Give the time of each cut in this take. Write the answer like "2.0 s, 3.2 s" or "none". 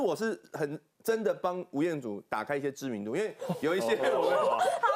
none